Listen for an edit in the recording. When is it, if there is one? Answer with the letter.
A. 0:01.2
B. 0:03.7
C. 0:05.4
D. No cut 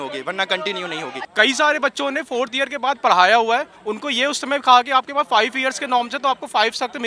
A